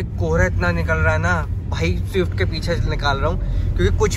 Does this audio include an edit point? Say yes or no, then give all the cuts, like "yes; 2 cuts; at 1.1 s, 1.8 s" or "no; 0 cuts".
no; 0 cuts